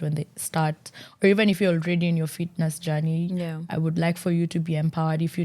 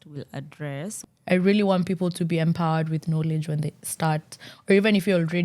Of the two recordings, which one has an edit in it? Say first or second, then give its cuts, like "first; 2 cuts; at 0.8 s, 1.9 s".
second; 1 cut; at 0.9 s